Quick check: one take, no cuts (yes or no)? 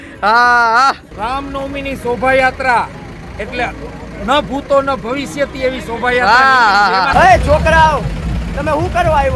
no